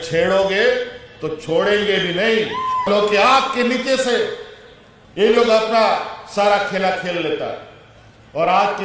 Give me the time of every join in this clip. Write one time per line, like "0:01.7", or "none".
0:02.9